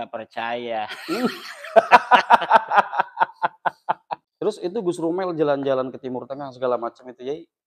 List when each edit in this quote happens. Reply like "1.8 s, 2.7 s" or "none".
4.2 s